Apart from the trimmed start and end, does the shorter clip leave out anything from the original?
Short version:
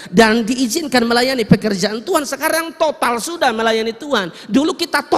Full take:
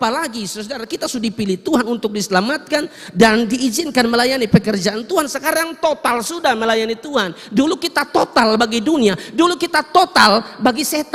no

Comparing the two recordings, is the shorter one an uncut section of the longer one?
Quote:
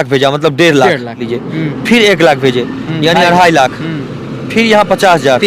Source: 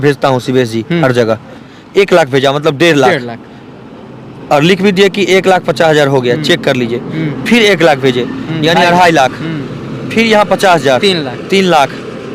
no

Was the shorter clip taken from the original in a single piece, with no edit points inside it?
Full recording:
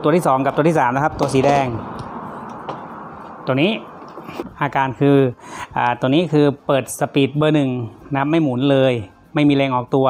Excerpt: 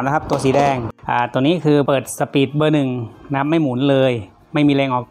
no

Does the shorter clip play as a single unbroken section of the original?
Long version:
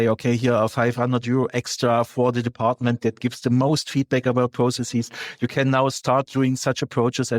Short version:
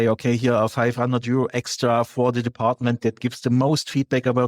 yes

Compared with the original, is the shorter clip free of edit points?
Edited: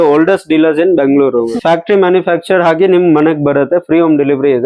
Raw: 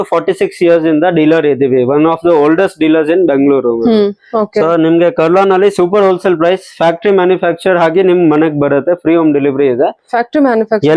no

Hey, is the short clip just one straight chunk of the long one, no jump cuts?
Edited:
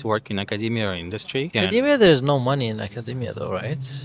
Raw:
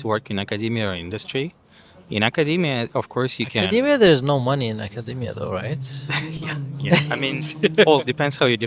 no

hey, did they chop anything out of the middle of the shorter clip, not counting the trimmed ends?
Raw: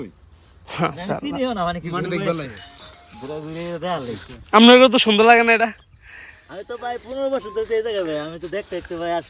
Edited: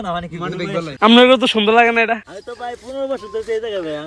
yes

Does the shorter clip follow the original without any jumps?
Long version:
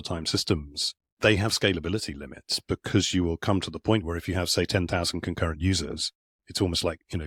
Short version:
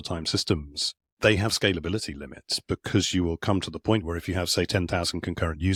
yes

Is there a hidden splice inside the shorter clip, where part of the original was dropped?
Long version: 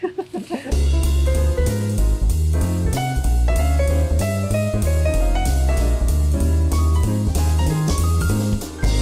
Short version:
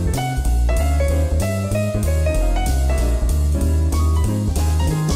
no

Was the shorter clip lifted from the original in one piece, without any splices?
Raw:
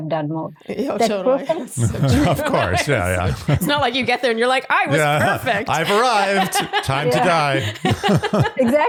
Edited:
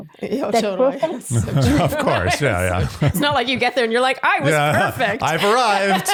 yes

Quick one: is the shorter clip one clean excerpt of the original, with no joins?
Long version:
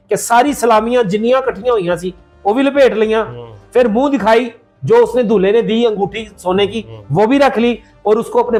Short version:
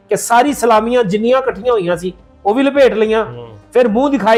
yes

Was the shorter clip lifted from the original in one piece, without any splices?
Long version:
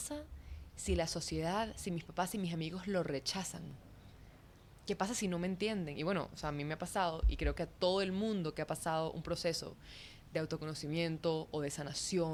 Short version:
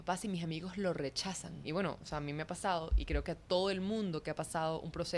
no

